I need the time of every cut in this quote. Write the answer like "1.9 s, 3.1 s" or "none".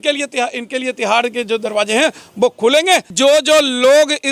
3.1 s